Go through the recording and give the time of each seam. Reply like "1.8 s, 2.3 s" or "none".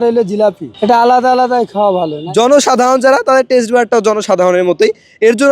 2.2 s